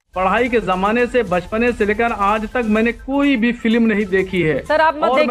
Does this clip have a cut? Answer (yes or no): no